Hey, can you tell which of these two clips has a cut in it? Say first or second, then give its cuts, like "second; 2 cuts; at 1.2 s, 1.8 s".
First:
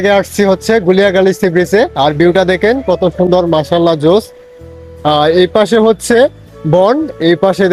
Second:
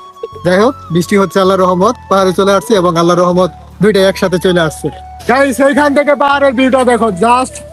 second; 1 cut; at 5.2 s